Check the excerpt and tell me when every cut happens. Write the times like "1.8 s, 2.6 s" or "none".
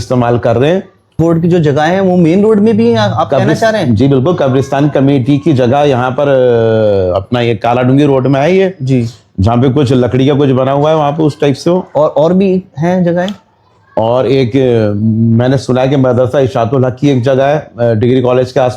1.2 s